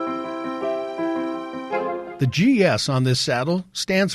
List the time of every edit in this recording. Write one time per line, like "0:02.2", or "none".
0:02.1